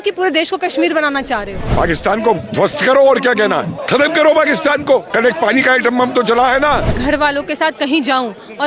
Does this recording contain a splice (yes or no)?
yes